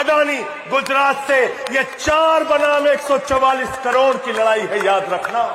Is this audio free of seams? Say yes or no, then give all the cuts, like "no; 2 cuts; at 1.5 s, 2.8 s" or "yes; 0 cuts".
yes; 0 cuts